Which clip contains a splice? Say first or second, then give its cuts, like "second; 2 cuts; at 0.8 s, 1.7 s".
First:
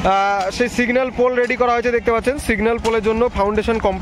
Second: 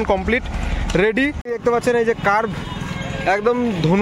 second; 1 cut; at 1.5 s